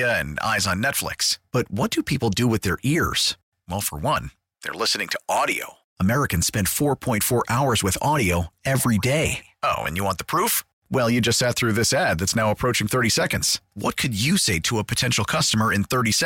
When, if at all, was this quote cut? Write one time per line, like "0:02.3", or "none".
none